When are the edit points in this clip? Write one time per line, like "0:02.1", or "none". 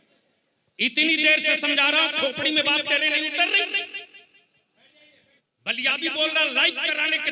0:05.4